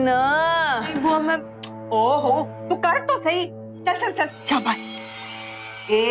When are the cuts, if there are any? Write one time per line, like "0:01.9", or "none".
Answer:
none